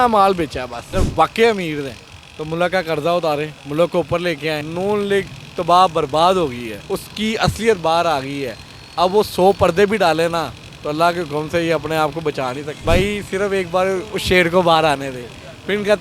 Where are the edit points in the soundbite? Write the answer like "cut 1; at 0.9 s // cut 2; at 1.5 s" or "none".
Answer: cut 1; at 0.9 s // cut 2; at 4.7 s // cut 3; at 6.7 s // cut 4; at 12.7 s